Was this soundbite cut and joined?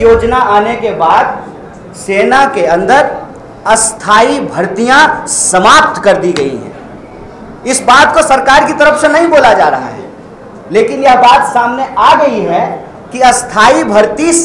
no; 0 cuts

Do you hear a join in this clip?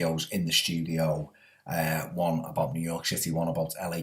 yes; 1 cut; at 2.3 s

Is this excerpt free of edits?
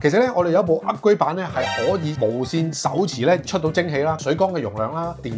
yes; 0 cuts

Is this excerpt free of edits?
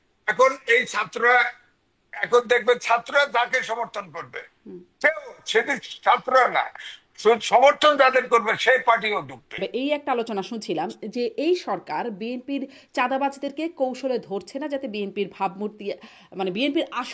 no; 1 cut; at 9.6 s

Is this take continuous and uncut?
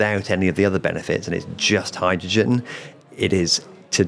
yes; 0 cuts

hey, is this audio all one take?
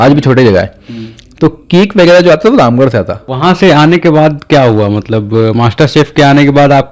no; 1 cut; at 3.2 s

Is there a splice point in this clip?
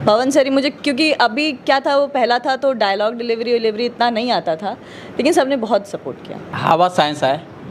yes; 1 cut; at 6.5 s

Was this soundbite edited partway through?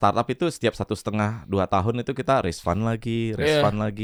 no; 0 cuts

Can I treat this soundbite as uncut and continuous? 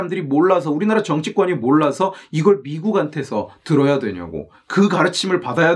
yes; 0 cuts

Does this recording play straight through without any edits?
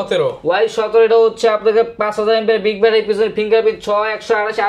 yes; 0 cuts

